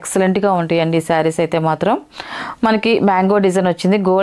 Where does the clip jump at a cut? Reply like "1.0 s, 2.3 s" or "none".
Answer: none